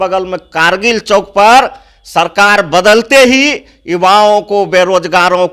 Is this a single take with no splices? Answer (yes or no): yes